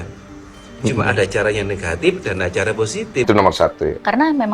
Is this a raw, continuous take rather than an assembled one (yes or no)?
no